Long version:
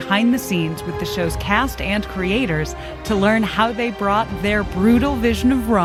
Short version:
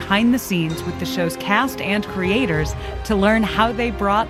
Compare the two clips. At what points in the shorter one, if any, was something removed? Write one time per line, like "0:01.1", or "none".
none